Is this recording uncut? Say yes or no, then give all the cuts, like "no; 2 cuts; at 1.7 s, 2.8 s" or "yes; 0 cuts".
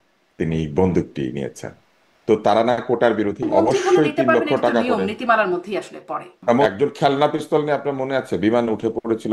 no; 2 cuts; at 3.4 s, 6.7 s